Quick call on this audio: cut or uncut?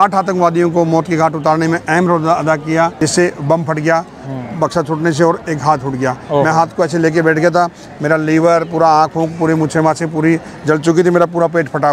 cut